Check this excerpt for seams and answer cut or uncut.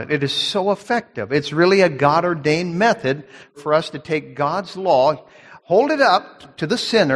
cut